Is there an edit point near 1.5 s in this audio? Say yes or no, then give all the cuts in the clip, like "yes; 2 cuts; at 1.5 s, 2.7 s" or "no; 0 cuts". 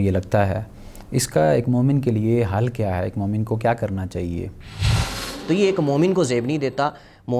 no; 1 cut; at 5.1 s